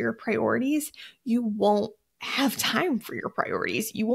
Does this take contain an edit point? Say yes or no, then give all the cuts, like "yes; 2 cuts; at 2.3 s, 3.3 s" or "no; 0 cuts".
no; 0 cuts